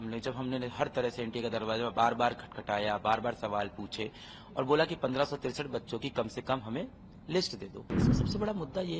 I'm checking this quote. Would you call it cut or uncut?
cut